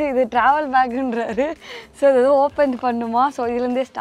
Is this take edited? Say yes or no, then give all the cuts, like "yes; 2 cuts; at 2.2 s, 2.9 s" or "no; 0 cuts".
no; 0 cuts